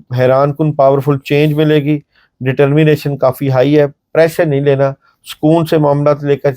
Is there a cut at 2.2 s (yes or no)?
no